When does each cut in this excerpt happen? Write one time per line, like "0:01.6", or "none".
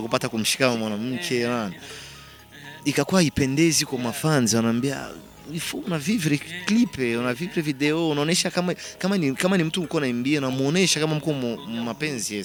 none

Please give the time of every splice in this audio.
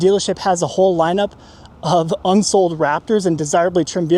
none

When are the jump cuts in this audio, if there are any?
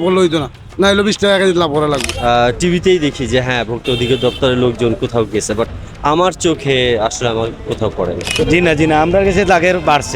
0:02.1
0:08.3

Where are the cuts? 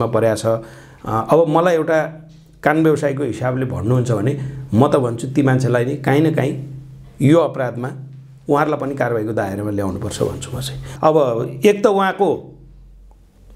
0:10.8

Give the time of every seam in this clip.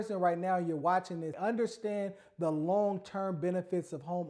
0:01.3

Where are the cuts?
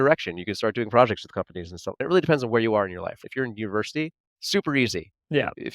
0:02.0
0:03.2

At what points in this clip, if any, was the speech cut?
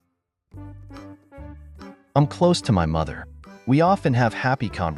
0:02.1

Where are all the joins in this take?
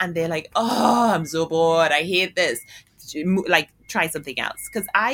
none

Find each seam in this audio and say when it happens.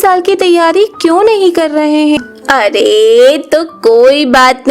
0:02.2

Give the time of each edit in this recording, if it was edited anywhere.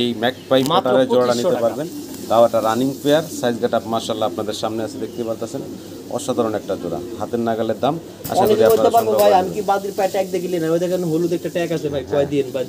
none

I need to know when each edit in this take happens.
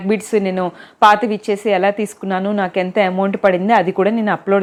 none

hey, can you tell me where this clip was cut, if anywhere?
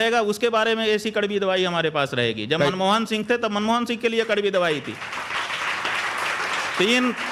none

